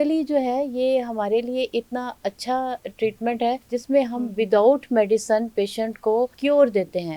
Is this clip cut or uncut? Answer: cut